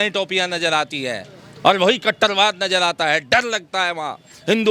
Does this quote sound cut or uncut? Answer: uncut